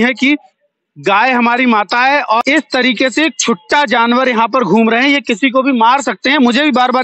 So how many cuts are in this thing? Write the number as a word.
one